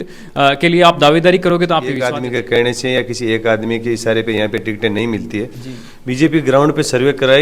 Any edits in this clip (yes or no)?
yes